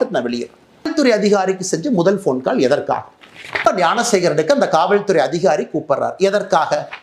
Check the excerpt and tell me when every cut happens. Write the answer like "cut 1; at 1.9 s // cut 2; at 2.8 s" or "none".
cut 1; at 0.9 s // cut 2; at 3.7 s